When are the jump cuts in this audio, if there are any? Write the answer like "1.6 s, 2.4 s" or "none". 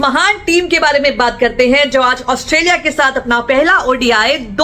none